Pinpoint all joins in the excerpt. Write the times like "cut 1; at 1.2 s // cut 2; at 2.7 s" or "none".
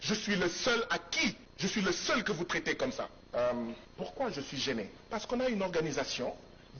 cut 1; at 1.5 s // cut 2; at 3.2 s // cut 3; at 3.9 s // cut 4; at 5.0 s